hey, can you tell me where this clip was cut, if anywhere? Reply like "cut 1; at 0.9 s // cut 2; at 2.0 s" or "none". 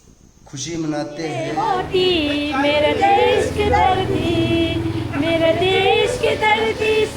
cut 1; at 1.5 s